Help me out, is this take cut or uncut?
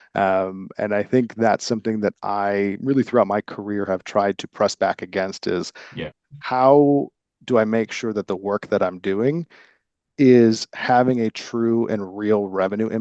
uncut